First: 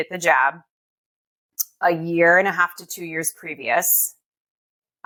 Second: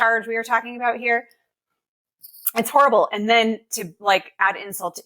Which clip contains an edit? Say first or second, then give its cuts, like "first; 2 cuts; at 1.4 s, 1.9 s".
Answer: second; 1 cut; at 1.8 s